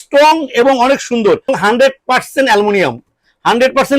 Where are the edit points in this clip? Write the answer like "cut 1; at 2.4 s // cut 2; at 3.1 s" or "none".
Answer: cut 1; at 1.5 s